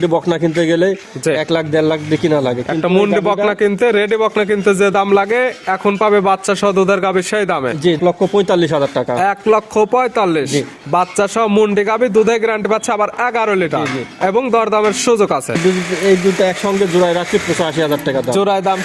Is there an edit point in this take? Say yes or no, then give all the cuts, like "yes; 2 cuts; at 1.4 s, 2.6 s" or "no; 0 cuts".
yes; 2 cuts; at 8.0 s, 15.6 s